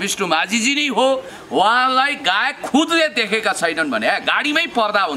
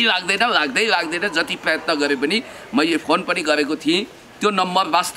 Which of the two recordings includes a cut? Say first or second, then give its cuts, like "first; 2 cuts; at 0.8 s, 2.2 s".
first; 1 cut; at 1.3 s